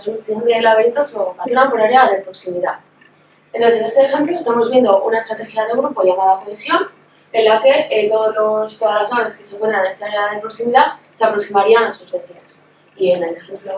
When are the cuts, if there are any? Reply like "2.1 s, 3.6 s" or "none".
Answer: none